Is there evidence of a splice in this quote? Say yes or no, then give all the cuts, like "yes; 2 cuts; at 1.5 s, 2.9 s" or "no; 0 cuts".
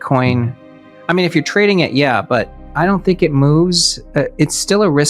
yes; 1 cut; at 2.6 s